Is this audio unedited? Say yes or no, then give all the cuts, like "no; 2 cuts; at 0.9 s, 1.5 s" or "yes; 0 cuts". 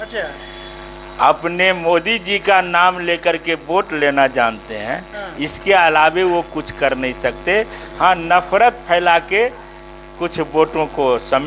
yes; 0 cuts